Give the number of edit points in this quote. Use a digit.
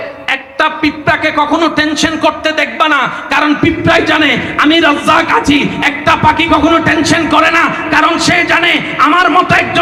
0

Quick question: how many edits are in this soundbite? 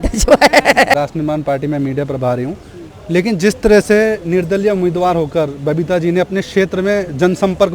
1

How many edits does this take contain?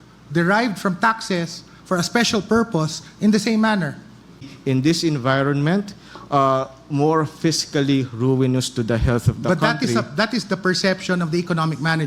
1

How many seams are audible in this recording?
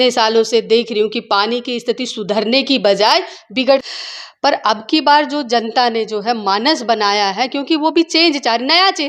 1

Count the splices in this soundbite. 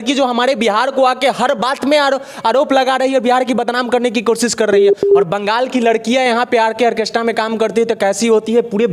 0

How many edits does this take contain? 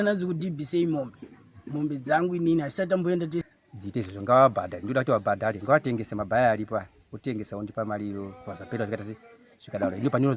1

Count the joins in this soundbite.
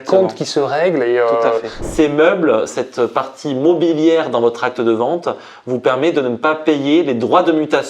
2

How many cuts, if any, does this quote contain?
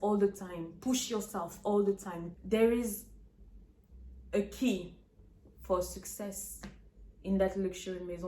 1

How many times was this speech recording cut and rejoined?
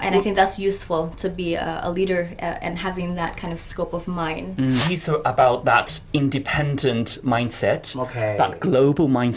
1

